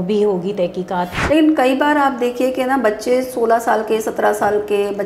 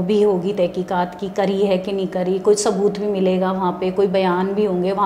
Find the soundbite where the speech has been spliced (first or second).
first